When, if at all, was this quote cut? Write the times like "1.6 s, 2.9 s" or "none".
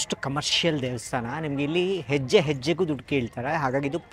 none